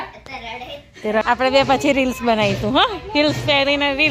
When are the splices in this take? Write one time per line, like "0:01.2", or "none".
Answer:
0:01.2